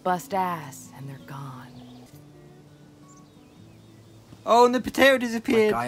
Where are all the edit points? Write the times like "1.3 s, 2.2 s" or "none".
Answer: 2.1 s